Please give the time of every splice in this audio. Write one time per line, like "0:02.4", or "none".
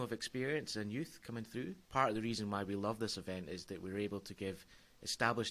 0:01.8